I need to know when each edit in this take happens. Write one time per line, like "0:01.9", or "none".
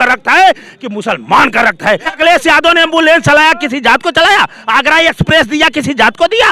0:02.1